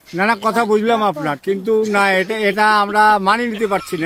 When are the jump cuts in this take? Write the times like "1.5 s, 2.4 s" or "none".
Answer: none